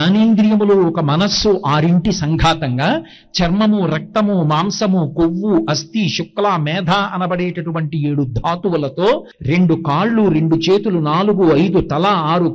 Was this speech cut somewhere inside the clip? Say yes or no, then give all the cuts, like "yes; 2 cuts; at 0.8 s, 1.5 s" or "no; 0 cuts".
yes; 1 cut; at 9.3 s